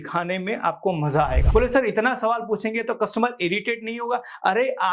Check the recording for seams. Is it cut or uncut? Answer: cut